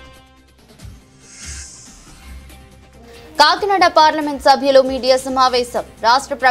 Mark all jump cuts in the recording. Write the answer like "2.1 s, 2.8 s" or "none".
1.9 s